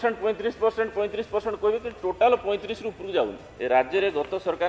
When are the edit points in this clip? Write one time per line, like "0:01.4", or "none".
0:03.5